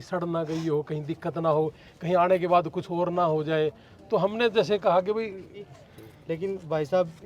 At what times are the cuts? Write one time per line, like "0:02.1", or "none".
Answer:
0:05.6